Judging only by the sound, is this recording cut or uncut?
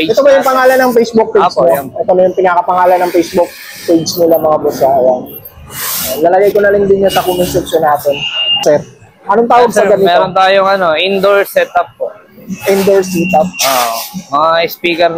cut